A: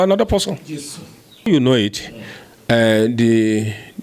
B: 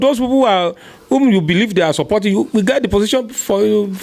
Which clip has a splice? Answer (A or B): A